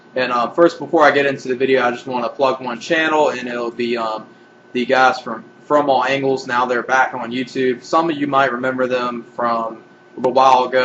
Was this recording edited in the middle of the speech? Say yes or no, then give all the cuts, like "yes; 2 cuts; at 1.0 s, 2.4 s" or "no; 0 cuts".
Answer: no; 0 cuts